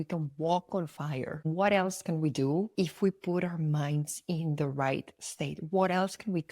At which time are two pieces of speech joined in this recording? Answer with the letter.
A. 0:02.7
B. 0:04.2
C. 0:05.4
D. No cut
A